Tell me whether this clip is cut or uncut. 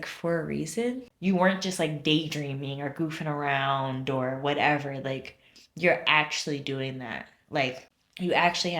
cut